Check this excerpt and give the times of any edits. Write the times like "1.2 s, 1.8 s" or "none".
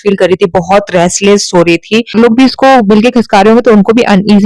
2.1 s